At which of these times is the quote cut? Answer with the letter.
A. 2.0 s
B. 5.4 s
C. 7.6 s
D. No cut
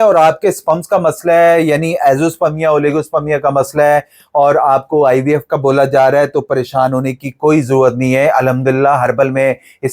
D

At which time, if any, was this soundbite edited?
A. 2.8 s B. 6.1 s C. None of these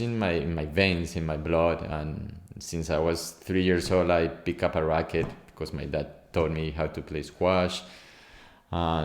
C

